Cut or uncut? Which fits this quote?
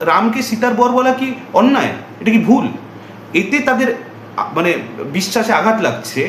uncut